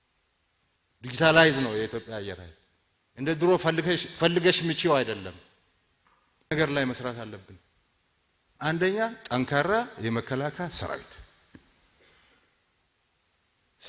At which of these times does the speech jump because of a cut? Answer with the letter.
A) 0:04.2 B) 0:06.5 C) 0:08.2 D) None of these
B